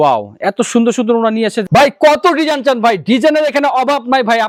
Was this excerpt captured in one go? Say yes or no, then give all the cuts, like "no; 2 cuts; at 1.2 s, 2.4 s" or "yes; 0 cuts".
yes; 0 cuts